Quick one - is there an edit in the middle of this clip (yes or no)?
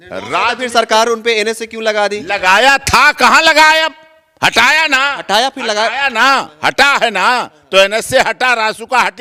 no